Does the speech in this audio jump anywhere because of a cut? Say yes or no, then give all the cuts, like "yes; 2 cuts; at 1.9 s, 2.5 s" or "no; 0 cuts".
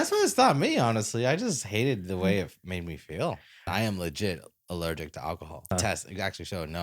yes; 2 cuts; at 3.7 s, 5.7 s